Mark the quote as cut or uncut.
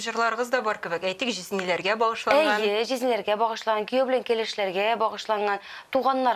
uncut